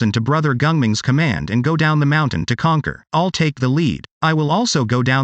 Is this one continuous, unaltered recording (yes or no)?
no